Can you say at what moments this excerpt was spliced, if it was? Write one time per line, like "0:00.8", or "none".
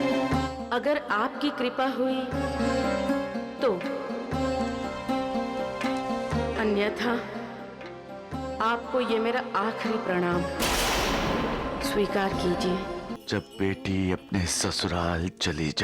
0:13.1